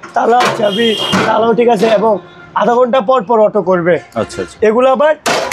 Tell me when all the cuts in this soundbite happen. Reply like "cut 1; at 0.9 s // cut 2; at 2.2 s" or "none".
none